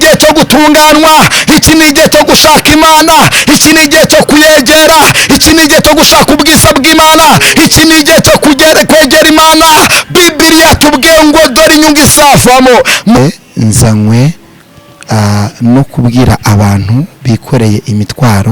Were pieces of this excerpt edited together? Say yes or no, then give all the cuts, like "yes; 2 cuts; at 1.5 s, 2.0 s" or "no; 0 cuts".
yes; 1 cut; at 13.2 s